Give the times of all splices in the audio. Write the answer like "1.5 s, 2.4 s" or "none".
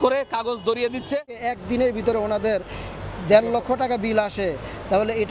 1.2 s